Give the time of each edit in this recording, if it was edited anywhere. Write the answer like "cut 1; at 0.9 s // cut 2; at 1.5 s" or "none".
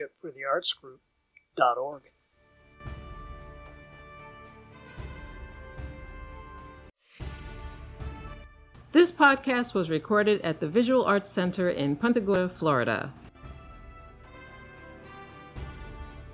none